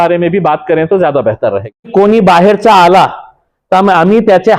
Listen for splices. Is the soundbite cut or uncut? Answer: cut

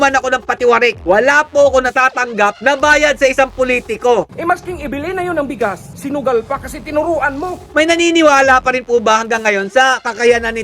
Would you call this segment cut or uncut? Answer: cut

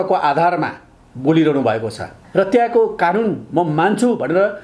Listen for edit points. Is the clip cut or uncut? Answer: cut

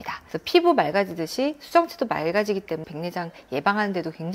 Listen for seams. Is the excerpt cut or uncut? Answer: cut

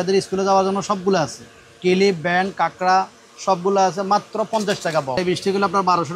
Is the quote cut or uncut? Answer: cut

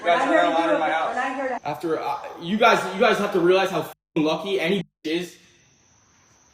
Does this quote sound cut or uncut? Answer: cut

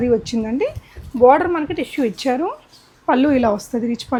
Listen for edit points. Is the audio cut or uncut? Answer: uncut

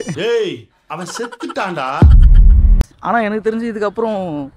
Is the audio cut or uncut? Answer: cut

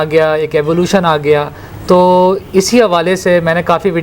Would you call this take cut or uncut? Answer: uncut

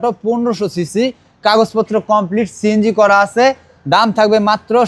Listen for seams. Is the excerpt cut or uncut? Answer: uncut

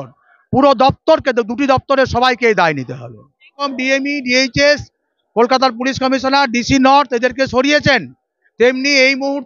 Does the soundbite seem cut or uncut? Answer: cut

